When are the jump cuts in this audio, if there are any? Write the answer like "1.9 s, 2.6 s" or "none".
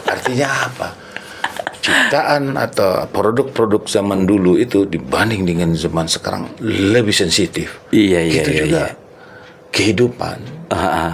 none